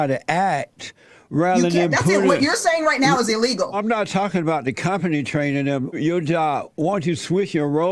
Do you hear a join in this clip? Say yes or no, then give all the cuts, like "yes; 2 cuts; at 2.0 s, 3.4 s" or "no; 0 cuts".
yes; 2 cuts; at 3.8 s, 6.0 s